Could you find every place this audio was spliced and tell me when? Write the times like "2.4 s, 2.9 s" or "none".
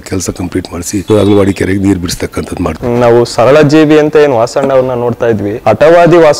1.0 s, 2.8 s, 5.5 s